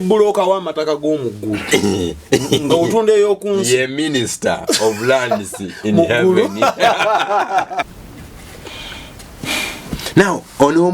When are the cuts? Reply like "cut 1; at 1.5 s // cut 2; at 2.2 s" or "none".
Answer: cut 1; at 8.0 s

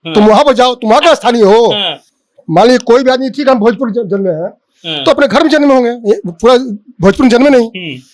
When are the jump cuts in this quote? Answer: none

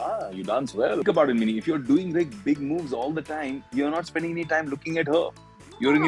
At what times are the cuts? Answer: cut 1; at 1.0 s

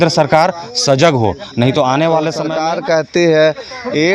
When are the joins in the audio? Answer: cut 1; at 2.4 s

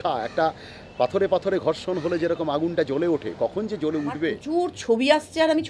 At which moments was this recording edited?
cut 1; at 4.4 s

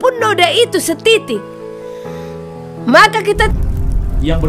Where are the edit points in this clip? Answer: cut 1; at 3.5 s

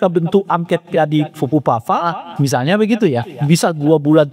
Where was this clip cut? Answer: none

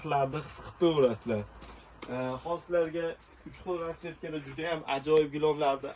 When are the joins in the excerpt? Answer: none

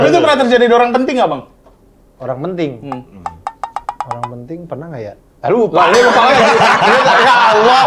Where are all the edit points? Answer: none

